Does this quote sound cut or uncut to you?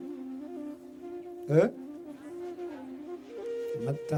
uncut